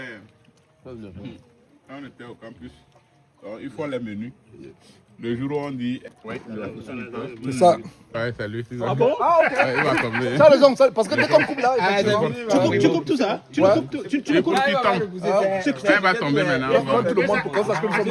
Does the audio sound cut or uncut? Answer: cut